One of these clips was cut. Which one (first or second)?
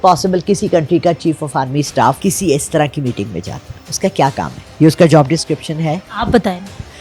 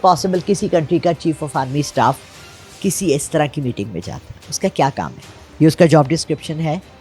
first